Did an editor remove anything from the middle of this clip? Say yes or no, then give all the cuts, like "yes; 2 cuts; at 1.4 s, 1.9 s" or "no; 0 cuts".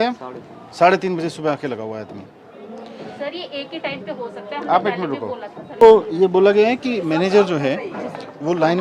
yes; 1 cut; at 5.8 s